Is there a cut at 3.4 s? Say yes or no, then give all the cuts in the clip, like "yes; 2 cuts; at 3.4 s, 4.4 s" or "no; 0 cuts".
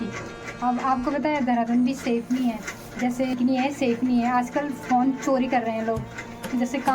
yes; 1 cut; at 3.4 s